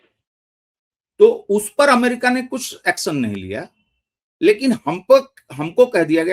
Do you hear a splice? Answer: no; 0 cuts

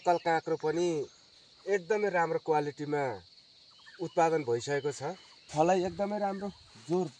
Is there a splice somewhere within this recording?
yes; 1 cut; at 5.5 s

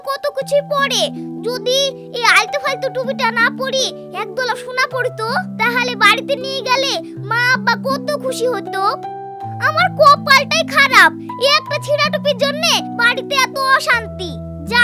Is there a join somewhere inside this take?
no; 0 cuts

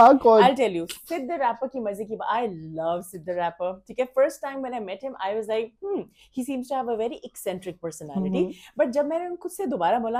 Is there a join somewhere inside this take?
no; 0 cuts

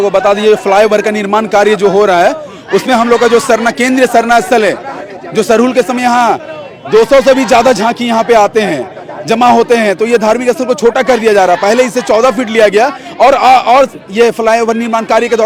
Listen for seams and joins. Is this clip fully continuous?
yes; 0 cuts

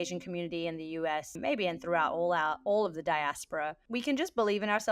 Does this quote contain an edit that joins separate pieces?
yes; 2 cuts; at 1.4 s, 3.8 s

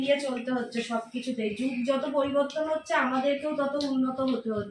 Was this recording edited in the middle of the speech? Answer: no; 0 cuts

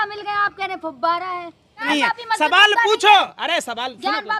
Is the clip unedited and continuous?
no; 1 cut; at 1.9 s

